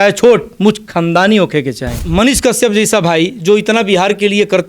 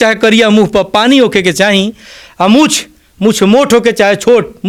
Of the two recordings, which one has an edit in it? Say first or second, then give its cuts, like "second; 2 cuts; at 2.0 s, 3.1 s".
first; 1 cut; at 2.0 s